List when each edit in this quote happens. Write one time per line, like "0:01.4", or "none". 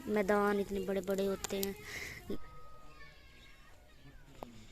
0:02.3